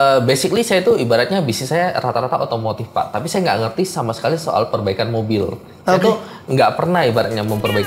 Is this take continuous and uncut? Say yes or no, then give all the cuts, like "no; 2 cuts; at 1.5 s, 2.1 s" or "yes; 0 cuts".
yes; 0 cuts